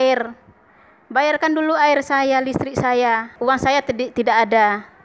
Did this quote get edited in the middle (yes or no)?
yes